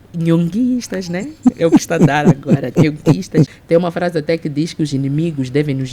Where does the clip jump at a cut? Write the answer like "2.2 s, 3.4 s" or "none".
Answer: 3.6 s